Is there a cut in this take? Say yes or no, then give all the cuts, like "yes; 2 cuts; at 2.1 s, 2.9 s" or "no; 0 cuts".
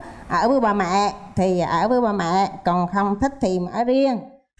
no; 0 cuts